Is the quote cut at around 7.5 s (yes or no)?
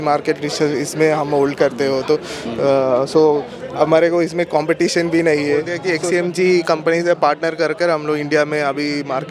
no